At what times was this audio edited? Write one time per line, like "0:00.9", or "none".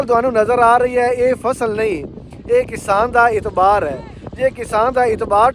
none